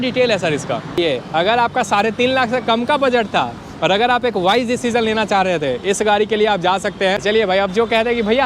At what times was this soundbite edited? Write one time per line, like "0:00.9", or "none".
0:01.0
0:07.2